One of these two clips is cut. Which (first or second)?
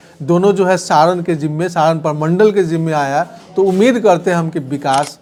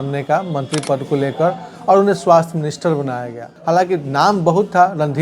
second